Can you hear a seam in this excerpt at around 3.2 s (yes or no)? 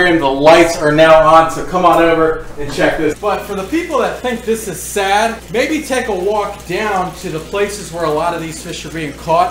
yes